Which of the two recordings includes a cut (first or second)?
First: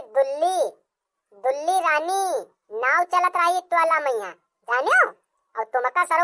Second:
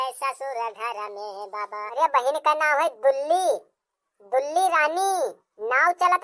second